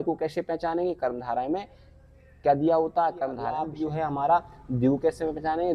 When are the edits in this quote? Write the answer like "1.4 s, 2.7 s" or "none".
3.6 s